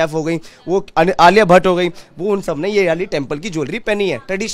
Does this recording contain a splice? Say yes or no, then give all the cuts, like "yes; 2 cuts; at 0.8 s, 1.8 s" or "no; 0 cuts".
no; 0 cuts